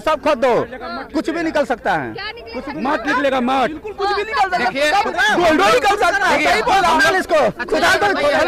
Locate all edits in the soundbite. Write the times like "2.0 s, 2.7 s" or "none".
none